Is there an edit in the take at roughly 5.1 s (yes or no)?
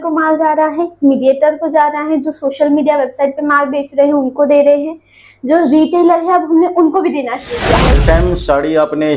no